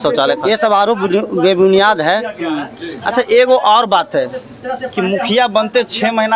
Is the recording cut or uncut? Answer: uncut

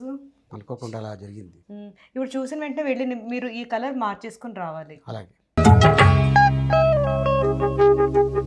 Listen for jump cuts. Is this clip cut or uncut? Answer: cut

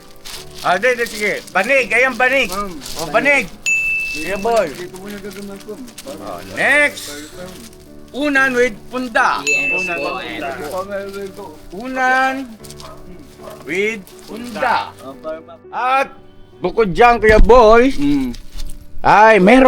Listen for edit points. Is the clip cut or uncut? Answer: cut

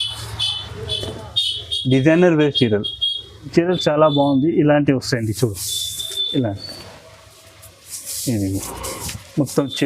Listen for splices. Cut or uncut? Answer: cut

